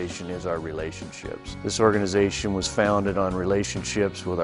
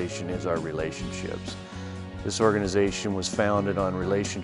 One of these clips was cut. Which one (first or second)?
first